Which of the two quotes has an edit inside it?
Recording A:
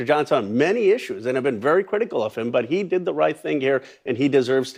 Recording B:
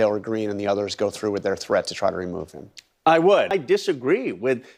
B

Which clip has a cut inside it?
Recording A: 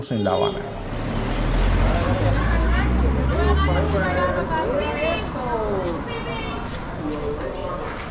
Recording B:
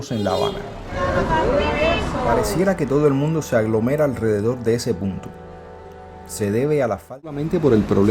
B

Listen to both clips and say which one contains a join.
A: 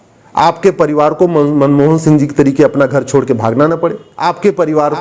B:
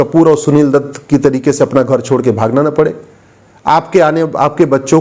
A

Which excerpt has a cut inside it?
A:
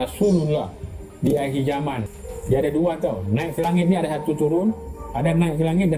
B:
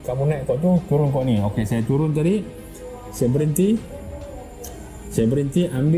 A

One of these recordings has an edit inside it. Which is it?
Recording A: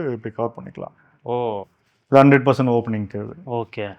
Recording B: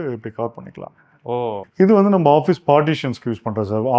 B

